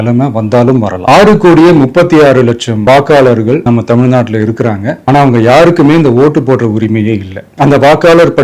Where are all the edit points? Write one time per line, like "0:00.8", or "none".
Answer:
0:01.0
0:02.7
0:07.4

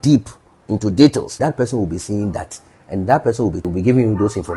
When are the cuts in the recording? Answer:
0:01.3
0:03.6

